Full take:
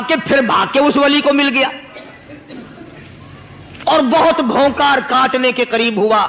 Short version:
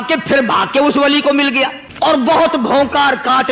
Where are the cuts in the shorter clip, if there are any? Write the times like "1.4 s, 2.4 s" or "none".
2.2 s